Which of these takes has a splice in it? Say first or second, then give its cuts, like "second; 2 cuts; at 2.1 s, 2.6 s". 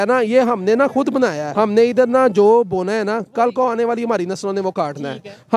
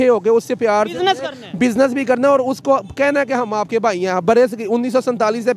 first; 1 cut; at 1.4 s